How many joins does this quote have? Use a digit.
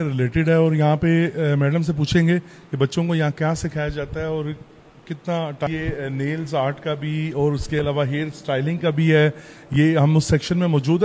1